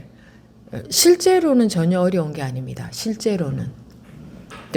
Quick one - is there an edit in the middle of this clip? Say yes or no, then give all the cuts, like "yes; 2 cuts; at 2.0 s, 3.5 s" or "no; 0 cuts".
no; 0 cuts